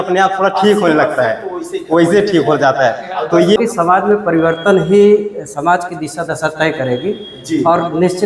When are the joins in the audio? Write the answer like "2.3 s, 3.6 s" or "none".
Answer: 3.6 s